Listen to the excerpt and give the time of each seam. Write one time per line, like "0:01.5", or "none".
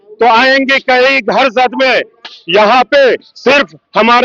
none